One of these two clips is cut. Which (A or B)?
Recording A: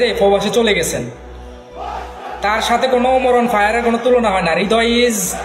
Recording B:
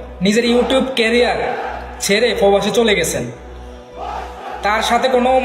A